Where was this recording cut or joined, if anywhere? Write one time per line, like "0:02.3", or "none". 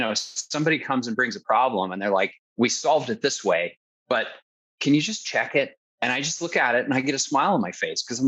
0:02.4
0:04.6
0:05.8

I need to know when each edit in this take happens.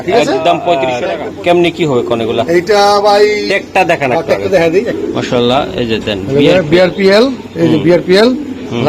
0:00.9

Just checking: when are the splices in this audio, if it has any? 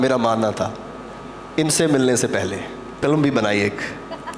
0:03.0

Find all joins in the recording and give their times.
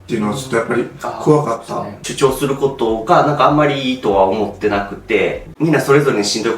0:02.0
0:05.5

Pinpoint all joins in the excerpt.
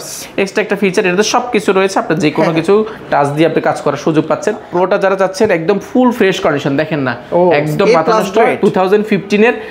0:04.7

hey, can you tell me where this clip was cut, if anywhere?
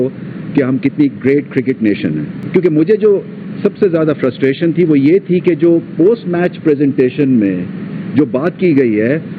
none

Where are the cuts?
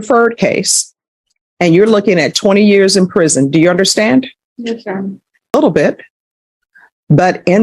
0:05.5

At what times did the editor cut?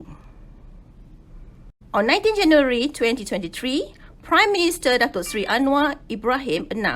0:01.7

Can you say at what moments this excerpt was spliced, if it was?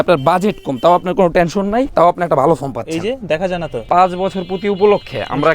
0:01.9
0:03.7

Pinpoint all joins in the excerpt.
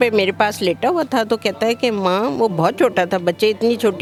none

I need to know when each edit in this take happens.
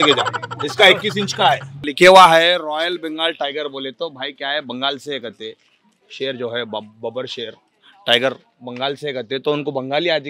0:01.8

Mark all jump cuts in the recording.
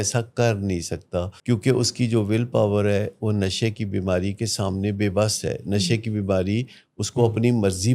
0:01.3

